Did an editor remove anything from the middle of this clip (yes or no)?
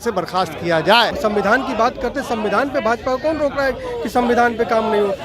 yes